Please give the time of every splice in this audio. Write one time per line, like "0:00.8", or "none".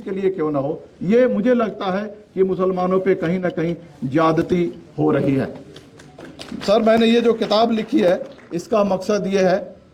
none